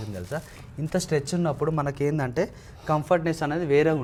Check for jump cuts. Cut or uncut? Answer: uncut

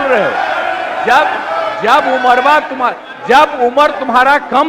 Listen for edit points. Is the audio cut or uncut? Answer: uncut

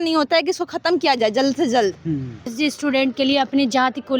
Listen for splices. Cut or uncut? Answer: cut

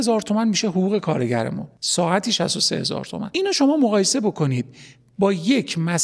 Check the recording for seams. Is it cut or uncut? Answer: uncut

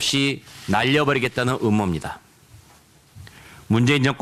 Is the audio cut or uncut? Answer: uncut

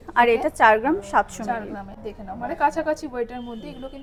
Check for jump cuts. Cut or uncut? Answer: uncut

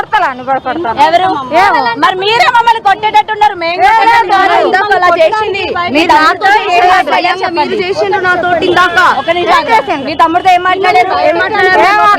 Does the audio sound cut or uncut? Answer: cut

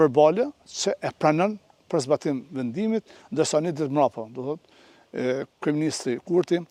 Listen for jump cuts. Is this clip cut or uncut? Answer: uncut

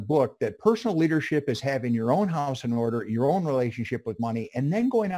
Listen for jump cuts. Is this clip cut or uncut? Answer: uncut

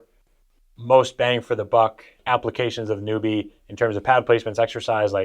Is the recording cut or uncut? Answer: cut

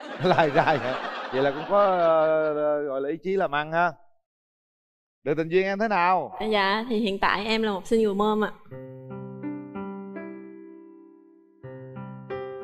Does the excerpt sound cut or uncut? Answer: cut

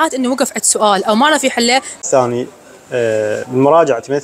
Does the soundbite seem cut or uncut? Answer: cut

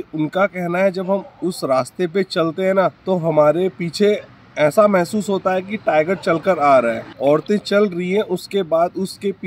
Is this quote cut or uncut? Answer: cut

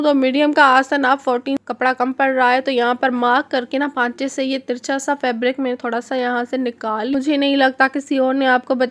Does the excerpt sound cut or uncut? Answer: cut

